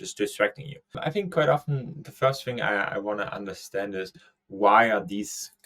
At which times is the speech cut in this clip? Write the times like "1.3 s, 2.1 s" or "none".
1.0 s